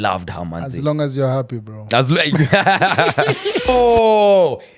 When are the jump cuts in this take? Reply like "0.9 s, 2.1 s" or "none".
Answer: 3.7 s